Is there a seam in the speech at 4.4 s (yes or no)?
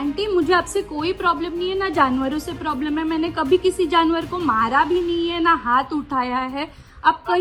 no